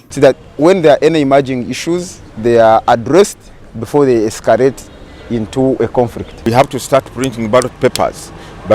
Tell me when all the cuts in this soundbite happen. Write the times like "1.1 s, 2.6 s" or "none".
6.4 s